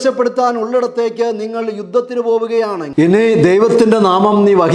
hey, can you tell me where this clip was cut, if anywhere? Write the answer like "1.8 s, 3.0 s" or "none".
2.9 s